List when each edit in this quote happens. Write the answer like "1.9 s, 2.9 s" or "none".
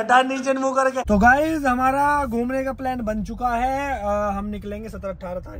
1.0 s